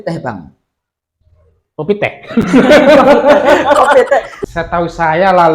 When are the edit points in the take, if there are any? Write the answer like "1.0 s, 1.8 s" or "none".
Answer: 4.3 s